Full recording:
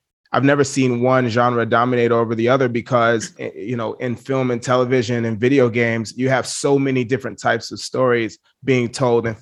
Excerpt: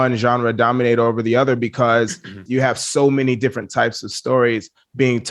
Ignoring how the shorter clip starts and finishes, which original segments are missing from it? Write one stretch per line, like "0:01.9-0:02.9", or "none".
0:03.5-0:06.1